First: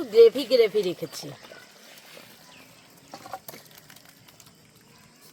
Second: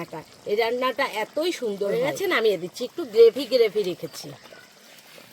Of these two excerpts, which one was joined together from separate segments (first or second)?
second